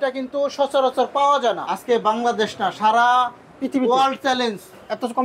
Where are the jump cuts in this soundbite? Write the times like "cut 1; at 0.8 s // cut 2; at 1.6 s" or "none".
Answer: cut 1; at 1.7 s